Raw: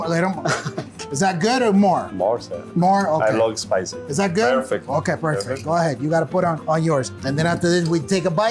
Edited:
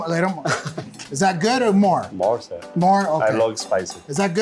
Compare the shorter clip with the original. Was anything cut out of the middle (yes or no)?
no